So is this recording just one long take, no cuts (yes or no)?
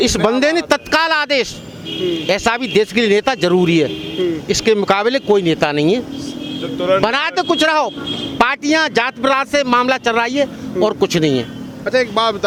yes